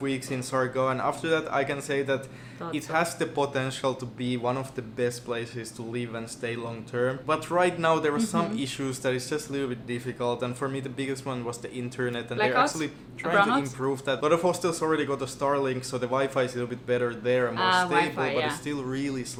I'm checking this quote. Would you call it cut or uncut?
uncut